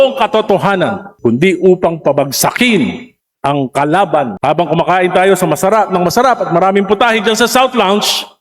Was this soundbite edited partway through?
yes; 2 cuts; at 1.1 s, 4.3 s

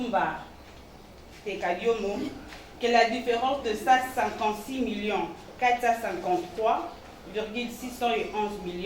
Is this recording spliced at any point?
yes; 1 cut; at 2.4 s

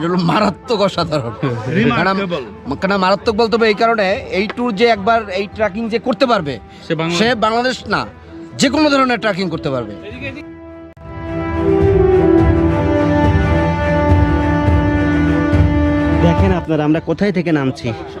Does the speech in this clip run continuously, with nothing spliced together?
yes; 0 cuts

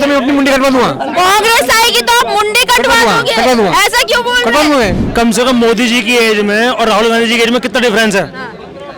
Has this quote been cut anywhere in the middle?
yes; 1 cut; at 5.0 s

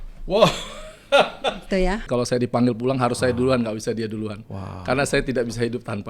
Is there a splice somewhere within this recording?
yes; 1 cut; at 2.1 s

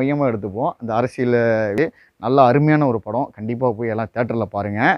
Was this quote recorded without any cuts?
no; 1 cut; at 1.8 s

